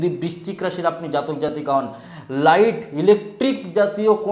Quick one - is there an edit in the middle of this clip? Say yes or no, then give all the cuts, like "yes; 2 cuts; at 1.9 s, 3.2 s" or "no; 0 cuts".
no; 0 cuts